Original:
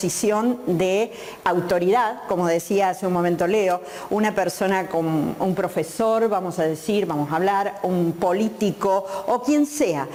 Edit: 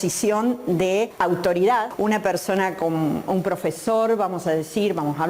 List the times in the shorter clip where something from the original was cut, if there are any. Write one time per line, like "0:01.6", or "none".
0:01.1
0:01.9